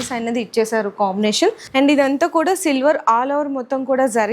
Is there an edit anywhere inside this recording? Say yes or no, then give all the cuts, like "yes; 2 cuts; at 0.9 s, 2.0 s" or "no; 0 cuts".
yes; 1 cut; at 1.6 s